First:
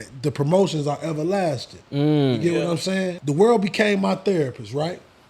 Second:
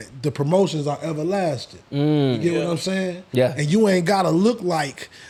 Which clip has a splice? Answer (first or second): first